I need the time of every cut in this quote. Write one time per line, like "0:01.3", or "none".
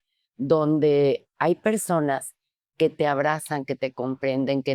none